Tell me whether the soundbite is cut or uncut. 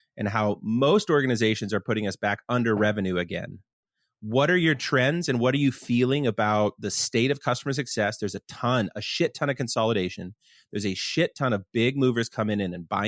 uncut